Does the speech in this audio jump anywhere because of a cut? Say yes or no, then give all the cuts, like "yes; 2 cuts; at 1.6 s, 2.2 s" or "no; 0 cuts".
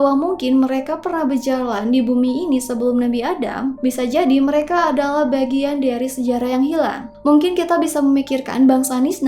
yes; 1 cut; at 7.1 s